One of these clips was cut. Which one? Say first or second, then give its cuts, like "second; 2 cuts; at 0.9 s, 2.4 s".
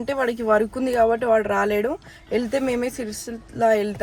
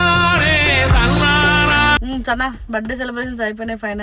second; 1 cut; at 2.0 s